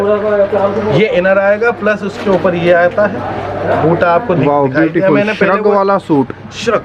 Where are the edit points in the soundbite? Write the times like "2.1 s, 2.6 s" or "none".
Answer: none